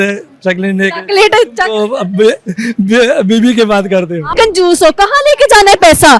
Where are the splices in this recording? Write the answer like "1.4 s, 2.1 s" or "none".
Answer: 4.3 s